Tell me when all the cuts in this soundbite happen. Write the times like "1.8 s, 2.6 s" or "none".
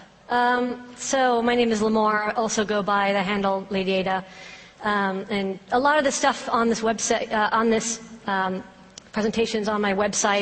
none